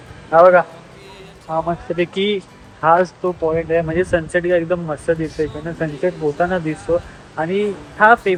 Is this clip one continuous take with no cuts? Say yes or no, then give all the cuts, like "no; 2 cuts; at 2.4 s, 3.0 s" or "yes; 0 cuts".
yes; 0 cuts